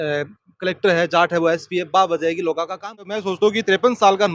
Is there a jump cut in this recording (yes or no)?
yes